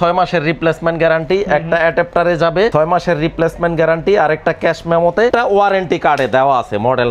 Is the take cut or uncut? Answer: cut